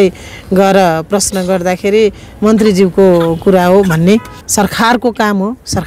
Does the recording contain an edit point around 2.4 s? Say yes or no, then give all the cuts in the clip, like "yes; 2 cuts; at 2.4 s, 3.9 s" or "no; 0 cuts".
no; 1 cut; at 4.4 s